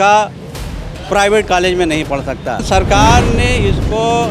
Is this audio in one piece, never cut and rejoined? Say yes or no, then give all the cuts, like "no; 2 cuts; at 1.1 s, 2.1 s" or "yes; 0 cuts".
no; 1 cut; at 2.6 s